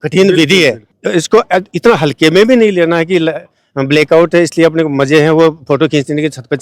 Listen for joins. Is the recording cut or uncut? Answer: cut